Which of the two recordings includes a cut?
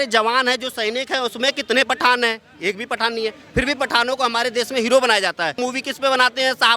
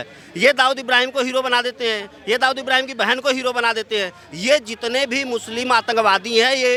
first; 1 cut; at 5.6 s

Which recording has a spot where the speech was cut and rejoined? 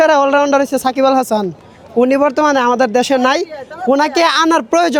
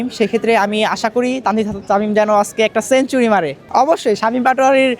second; 1 cut; at 3.6 s

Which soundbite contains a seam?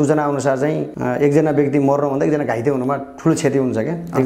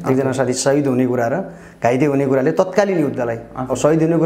first; 1 cut; at 0.9 s

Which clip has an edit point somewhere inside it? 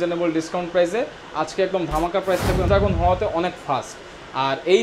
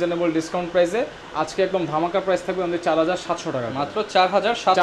first; 1 cut; at 2.7 s

